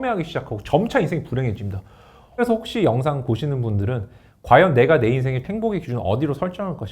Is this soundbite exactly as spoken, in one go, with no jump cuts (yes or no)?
no